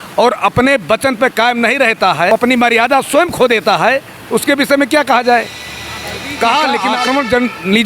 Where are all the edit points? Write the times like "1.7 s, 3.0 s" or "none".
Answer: 2.3 s, 6.9 s

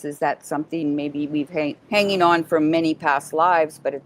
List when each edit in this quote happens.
1.8 s

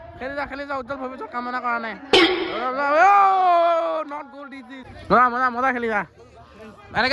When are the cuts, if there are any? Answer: none

